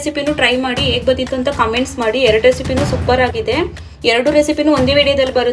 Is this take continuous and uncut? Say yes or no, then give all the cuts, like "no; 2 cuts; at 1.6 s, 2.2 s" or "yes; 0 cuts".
yes; 0 cuts